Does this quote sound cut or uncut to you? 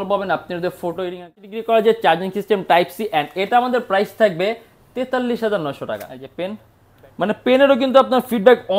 cut